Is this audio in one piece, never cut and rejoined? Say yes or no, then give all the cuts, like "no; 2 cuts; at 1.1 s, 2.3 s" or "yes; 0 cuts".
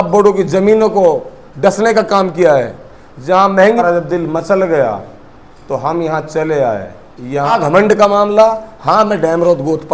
no; 2 cuts; at 3.8 s, 7.6 s